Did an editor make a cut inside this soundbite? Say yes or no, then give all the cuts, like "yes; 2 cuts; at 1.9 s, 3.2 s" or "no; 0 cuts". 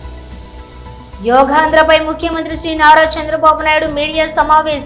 yes; 1 cut; at 1.1 s